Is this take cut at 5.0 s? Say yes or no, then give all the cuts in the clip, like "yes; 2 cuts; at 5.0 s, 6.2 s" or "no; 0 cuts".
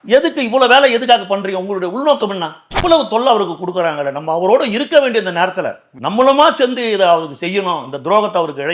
no; 1 cut; at 2.6 s